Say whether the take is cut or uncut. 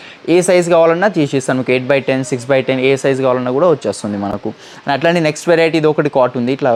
uncut